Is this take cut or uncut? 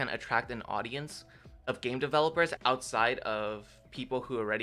cut